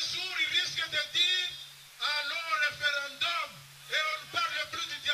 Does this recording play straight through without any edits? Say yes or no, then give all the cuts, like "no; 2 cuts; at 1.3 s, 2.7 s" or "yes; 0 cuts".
no; 1 cut; at 1.9 s